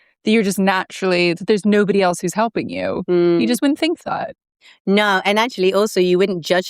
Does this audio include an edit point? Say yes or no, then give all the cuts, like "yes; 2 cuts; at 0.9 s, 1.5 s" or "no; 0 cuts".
no; 0 cuts